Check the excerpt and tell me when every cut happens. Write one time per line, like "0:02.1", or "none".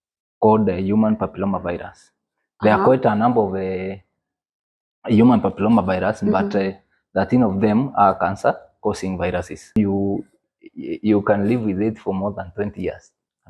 0:09.8